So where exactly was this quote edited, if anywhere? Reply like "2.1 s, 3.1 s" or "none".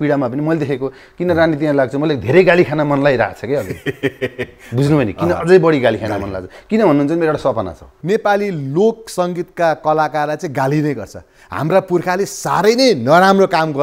7.9 s